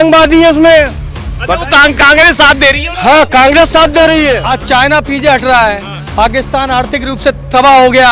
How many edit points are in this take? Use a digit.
1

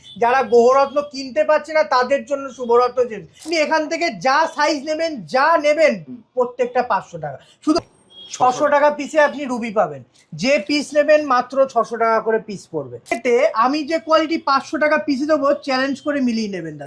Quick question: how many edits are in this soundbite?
3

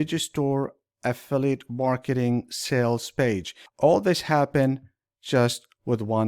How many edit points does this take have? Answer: 1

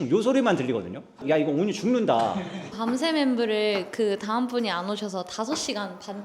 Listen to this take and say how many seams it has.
2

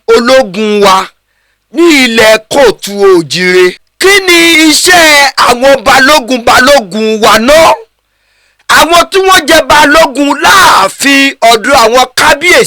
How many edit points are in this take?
1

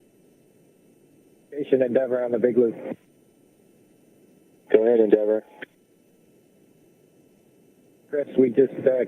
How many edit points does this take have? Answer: 4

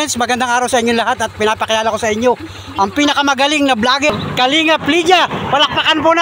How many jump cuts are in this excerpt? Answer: 1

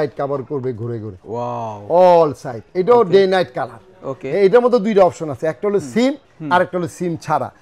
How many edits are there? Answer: 0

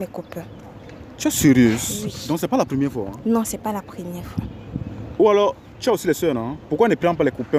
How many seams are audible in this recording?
0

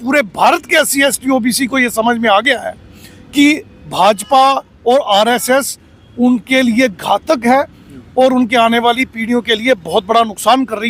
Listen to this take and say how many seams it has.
0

